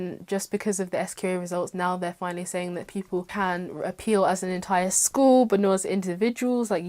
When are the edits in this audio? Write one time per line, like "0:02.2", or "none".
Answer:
0:03.3